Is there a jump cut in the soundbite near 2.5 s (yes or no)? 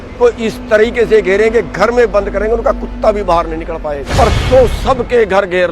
no